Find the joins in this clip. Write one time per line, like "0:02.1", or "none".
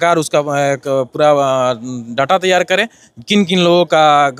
none